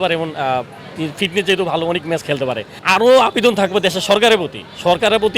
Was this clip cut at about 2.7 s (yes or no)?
yes